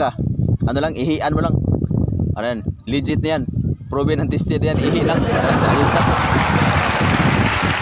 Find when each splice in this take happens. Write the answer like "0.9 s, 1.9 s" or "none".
none